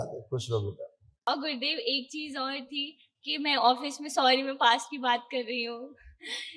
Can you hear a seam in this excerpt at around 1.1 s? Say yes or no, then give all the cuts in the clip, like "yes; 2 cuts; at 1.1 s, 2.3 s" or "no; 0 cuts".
yes; 1 cut; at 1.1 s